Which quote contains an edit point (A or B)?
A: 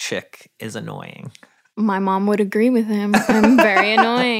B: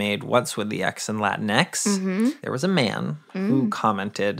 B